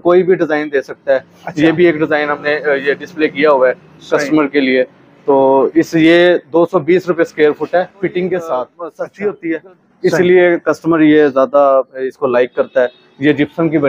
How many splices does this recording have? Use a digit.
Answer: 1